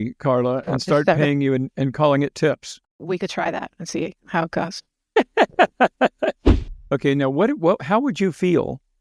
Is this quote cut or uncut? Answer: cut